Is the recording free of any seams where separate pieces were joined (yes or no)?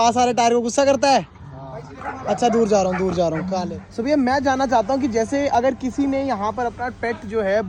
no